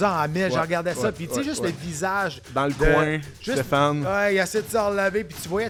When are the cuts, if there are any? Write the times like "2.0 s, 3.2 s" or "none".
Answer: none